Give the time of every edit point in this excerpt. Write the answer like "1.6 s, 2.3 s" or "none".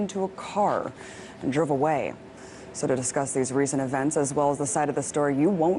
3.9 s